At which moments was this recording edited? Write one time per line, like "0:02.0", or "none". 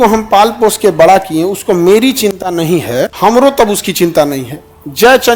none